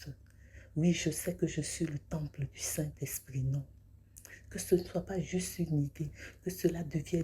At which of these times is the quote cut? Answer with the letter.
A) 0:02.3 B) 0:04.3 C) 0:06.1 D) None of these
C